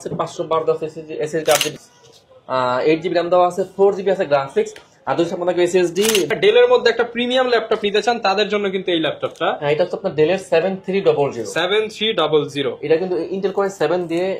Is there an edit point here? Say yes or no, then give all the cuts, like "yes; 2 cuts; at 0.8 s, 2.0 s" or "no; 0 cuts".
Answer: yes; 2 cuts; at 1.7 s, 6.3 s